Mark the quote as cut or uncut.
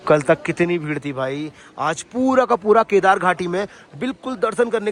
uncut